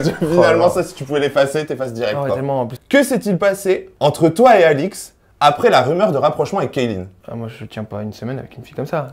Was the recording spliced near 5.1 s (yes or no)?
no